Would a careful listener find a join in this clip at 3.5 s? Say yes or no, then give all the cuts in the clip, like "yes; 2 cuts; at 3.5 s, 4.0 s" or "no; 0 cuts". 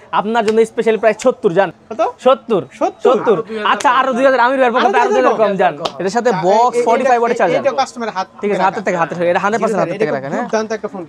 no; 2 cuts; at 1.8 s, 5.9 s